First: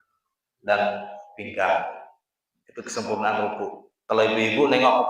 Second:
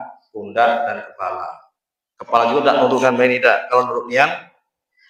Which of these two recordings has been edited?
first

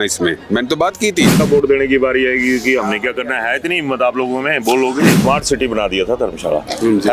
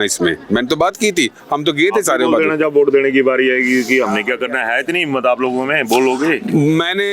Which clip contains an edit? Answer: first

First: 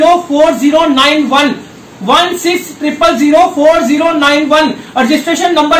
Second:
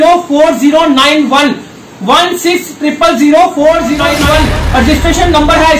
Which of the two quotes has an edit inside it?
second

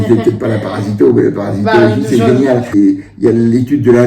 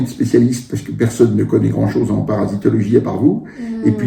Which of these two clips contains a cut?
first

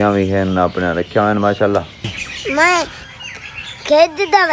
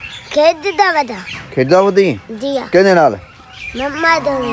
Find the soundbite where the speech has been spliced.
first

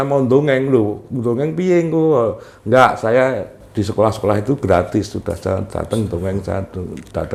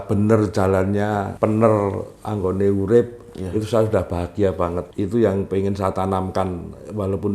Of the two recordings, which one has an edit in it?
second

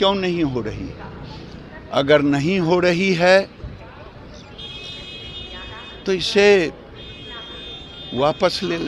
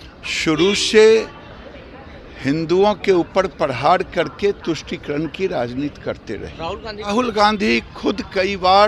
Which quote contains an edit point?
second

